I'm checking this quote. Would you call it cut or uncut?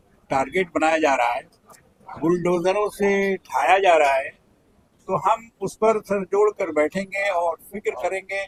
uncut